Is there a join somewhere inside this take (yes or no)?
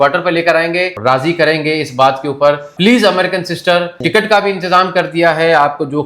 yes